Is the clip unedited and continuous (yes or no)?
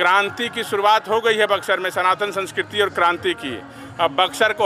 yes